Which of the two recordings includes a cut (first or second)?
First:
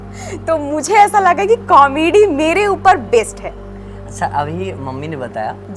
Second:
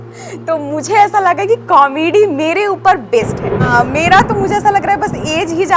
second